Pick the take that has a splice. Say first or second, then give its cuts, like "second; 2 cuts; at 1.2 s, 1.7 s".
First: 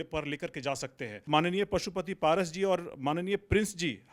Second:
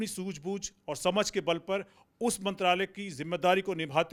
first; 1 cut; at 1.2 s